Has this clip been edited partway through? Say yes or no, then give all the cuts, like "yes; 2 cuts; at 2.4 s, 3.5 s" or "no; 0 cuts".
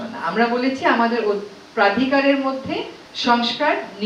yes; 1 cut; at 3.0 s